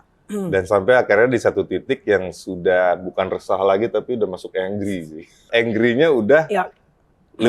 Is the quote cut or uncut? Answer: cut